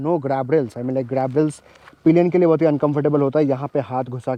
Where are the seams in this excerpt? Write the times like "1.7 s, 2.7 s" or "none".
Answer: none